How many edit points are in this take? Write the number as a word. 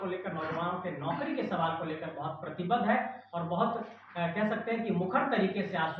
zero